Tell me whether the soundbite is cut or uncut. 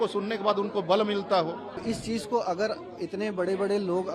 cut